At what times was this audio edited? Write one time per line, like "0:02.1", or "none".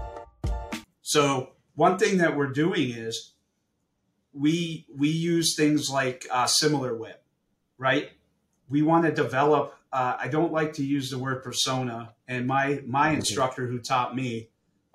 0:00.9